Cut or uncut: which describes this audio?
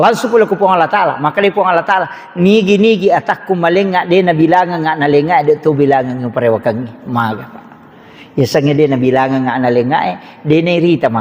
uncut